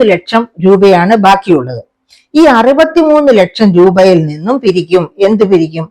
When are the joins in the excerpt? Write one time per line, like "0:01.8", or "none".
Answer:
none